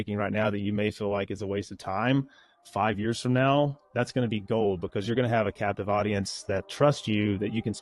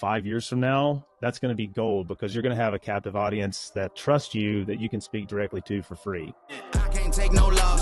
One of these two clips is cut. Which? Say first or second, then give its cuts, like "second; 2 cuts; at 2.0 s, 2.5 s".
second; 1 cut; at 6.4 s